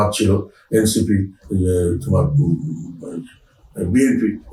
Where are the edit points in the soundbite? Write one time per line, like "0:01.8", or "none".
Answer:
none

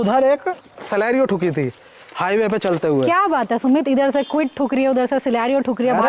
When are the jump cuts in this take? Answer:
none

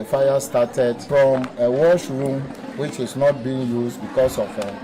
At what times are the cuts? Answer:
0:01.0

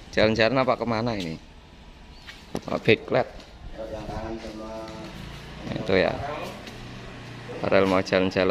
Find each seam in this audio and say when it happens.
none

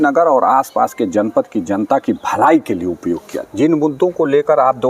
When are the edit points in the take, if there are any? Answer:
0:03.4

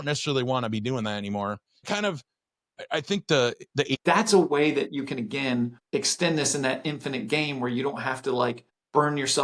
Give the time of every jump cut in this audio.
0:01.9
0:03.9

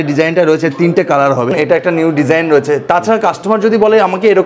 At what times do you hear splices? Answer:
0:01.5

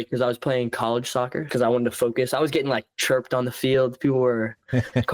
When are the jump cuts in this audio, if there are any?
0:01.4

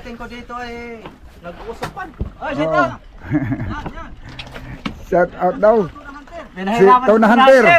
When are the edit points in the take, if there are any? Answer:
0:02.2

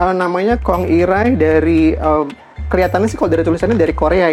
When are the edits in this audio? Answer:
none

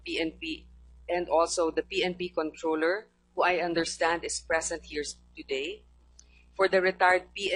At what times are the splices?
none

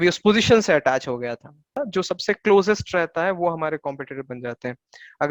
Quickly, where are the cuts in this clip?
0:01.8

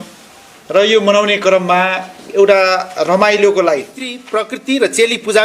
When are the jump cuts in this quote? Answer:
0:04.1

